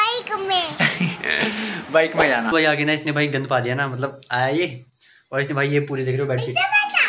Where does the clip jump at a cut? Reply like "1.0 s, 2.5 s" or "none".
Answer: 2.5 s